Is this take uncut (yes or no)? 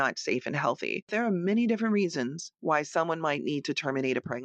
no